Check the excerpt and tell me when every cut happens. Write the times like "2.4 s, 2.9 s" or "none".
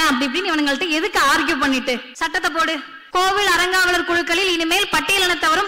2.1 s, 2.9 s